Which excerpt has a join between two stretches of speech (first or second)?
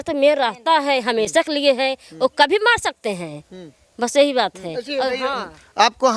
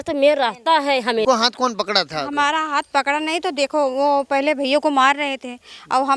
second